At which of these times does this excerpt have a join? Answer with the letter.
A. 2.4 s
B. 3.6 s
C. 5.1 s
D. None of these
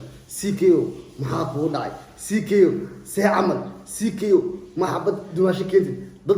D